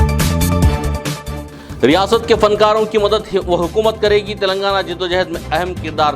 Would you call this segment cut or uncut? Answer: cut